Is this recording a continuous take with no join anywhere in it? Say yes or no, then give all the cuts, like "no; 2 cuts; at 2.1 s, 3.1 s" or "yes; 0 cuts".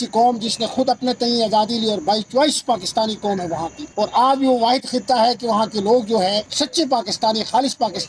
no; 2 cuts; at 3.8 s, 6.5 s